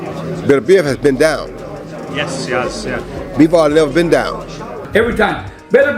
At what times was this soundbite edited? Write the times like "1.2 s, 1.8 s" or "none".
4.8 s